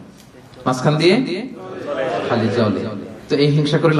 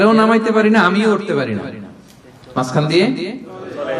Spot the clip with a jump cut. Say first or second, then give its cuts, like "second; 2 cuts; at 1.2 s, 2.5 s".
first; 1 cut; at 3.1 s